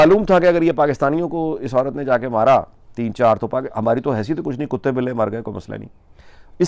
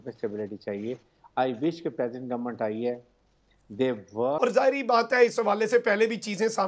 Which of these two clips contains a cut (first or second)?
second